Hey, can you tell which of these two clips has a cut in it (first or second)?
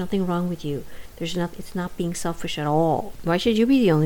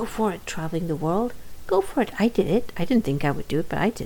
first